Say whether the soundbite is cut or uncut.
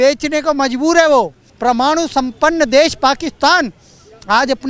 uncut